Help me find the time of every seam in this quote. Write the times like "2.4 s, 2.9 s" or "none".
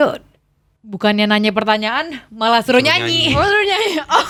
none